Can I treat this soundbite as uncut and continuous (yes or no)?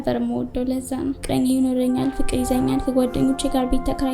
no